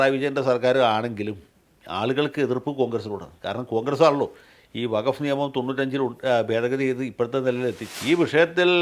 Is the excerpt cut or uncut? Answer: cut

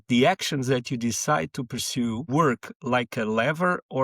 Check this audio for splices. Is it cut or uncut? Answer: cut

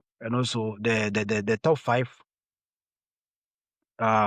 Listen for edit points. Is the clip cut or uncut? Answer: uncut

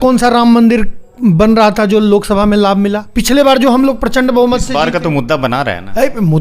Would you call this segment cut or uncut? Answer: cut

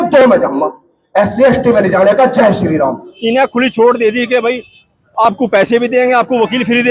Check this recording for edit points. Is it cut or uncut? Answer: cut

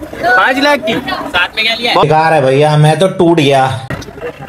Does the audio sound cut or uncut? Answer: uncut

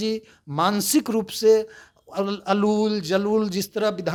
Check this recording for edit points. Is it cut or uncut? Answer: uncut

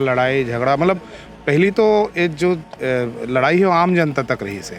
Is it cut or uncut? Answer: uncut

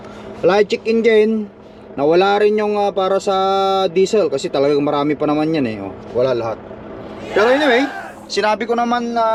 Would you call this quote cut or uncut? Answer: uncut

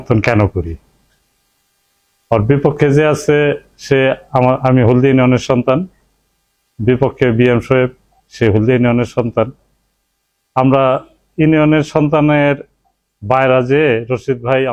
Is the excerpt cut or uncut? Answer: uncut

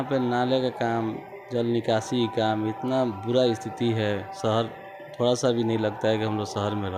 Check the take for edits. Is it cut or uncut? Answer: uncut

